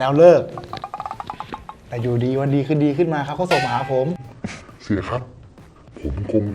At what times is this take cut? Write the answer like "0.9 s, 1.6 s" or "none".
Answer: none